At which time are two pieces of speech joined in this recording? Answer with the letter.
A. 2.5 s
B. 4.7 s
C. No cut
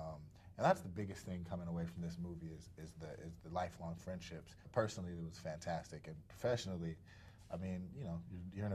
B